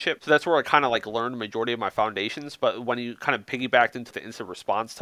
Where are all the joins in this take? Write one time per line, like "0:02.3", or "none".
0:04.1